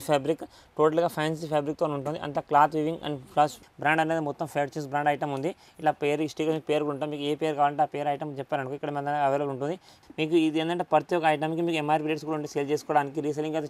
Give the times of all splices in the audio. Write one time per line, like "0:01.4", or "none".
0:03.7
0:09.9